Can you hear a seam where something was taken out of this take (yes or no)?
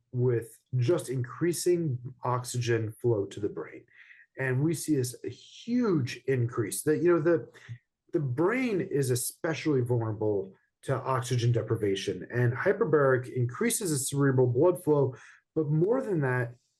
no